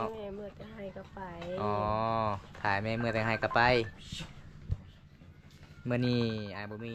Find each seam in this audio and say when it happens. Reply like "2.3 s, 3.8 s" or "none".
none